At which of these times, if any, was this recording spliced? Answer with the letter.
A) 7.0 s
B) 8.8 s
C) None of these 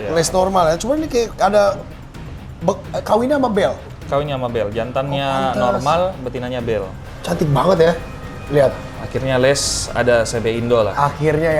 A